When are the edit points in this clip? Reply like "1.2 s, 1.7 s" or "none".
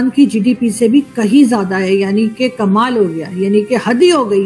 none